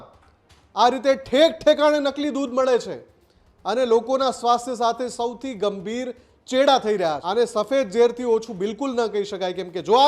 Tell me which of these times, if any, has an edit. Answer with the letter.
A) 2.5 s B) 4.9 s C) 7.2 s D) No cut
C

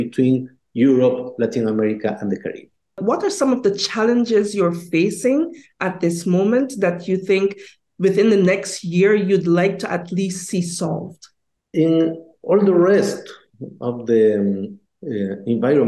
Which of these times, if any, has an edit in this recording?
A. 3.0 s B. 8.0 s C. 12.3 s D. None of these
A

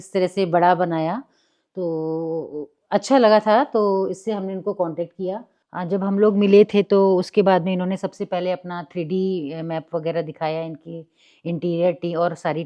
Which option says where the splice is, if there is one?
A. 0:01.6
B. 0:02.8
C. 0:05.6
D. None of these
C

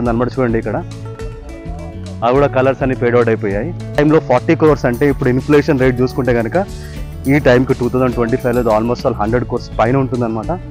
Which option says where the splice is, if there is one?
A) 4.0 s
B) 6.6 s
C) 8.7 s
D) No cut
A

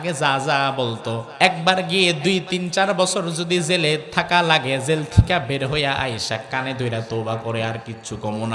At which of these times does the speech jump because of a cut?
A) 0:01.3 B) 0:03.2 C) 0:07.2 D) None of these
A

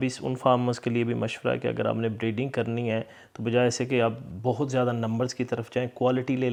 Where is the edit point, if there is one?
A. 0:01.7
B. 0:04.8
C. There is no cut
C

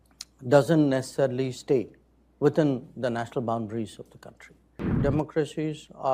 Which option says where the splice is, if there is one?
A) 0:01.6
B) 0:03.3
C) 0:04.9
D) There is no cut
C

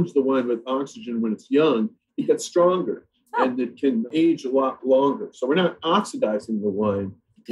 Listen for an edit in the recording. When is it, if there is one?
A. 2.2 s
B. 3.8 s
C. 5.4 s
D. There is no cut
D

